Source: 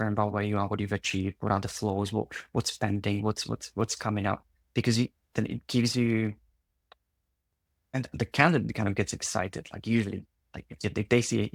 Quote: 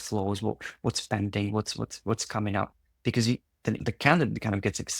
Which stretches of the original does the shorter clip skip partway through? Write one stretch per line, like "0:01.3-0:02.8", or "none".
0:05.5-0:08.1